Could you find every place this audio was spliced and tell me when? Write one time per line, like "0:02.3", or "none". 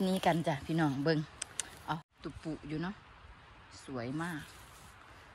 0:02.0

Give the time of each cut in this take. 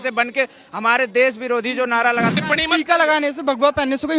0:02.4

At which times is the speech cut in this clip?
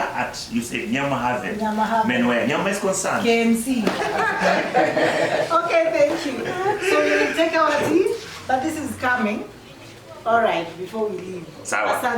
0:04.0

